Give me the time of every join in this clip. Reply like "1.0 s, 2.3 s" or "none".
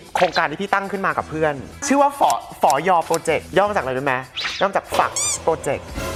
none